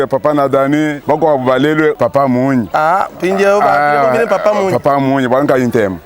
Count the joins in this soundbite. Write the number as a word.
two